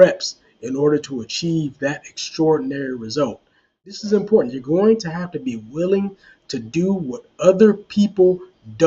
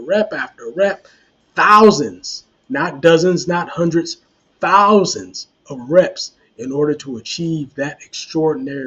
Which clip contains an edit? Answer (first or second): first